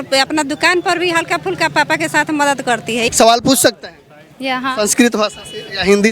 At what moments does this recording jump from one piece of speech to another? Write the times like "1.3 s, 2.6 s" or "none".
3.1 s

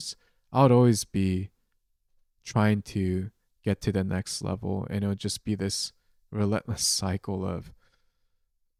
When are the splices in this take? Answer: none

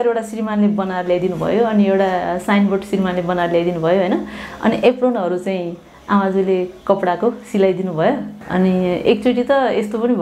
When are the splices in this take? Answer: 8.3 s

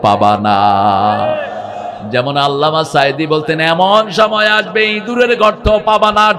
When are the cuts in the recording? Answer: none

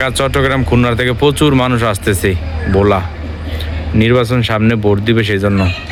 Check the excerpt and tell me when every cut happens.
none

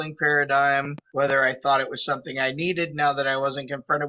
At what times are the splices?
1.0 s

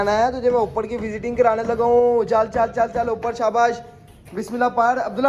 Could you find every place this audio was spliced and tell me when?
none

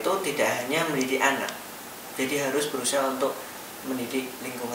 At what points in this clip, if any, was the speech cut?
none

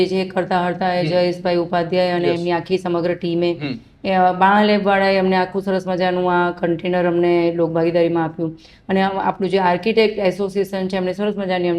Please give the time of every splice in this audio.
none

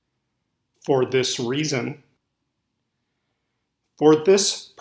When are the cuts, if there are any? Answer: 2.2 s

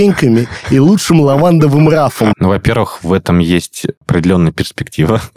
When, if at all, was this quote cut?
2.4 s, 4.0 s

